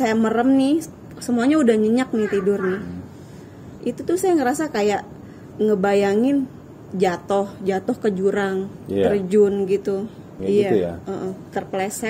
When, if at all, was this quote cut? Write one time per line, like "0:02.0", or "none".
0:10.4